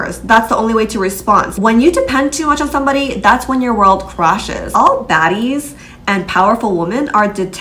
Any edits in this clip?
yes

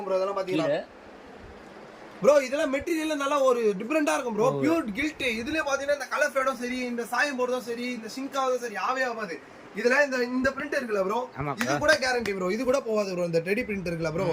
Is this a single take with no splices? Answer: yes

